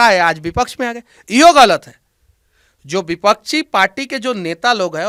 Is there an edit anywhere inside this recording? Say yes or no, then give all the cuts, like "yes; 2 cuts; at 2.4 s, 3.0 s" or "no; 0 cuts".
no; 0 cuts